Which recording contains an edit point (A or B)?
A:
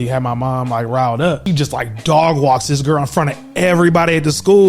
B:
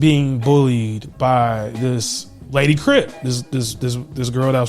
A